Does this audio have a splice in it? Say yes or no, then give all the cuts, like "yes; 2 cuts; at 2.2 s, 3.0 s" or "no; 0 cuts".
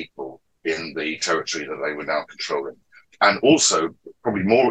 no; 0 cuts